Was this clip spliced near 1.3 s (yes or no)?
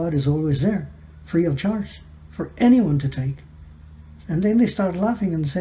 no